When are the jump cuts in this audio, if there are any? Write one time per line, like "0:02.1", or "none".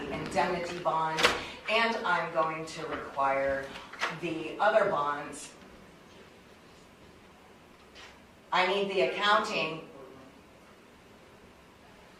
none